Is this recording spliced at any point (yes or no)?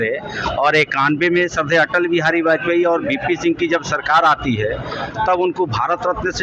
no